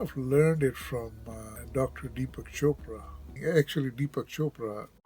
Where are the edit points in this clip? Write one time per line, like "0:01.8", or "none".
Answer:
0:01.5
0:03.3